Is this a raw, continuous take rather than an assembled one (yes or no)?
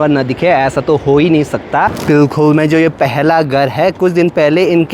no